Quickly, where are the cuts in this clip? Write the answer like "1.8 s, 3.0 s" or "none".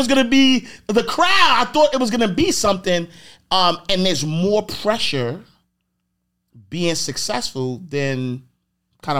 none